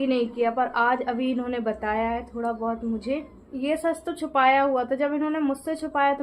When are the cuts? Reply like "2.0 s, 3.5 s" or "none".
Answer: 3.5 s